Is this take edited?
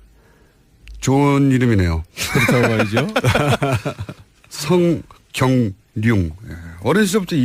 no; 0 cuts

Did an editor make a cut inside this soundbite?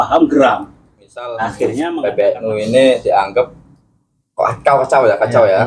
yes; 1 cut; at 1.9 s

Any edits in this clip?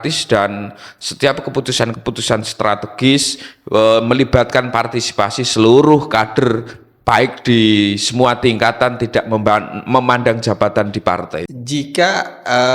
yes; 1 cut; at 11.5 s

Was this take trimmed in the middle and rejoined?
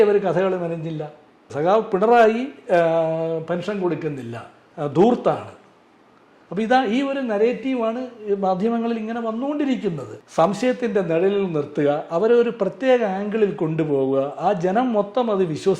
yes; 2 cuts; at 1.5 s, 10.1 s

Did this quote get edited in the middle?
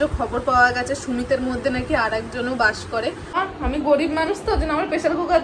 yes; 1 cut; at 3.4 s

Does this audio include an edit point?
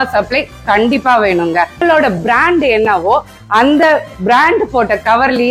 yes; 1 cut; at 1.8 s

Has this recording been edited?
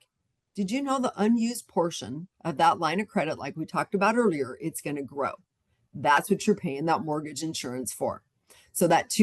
no; 0 cuts

